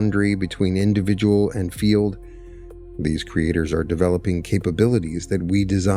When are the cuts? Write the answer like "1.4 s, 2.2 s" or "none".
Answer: none